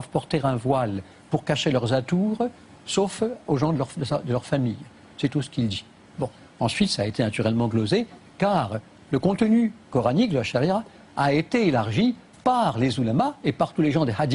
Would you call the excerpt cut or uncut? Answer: cut